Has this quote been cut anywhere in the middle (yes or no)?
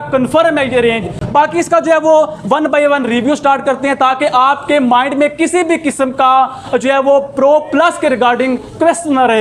no